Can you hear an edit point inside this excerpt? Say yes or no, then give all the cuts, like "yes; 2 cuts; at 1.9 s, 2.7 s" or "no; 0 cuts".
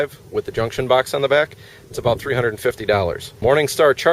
no; 0 cuts